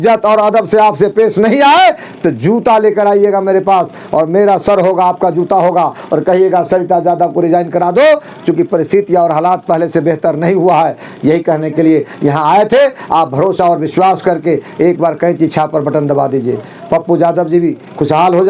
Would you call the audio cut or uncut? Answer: uncut